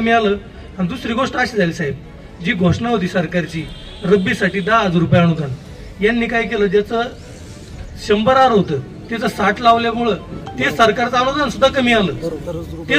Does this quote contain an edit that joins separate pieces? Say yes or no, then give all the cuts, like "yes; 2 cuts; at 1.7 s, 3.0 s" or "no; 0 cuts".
no; 0 cuts